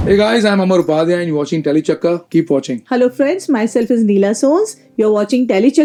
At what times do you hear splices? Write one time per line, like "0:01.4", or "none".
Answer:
none